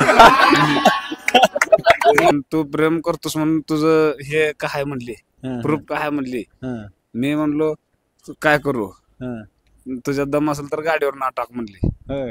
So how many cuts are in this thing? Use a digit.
1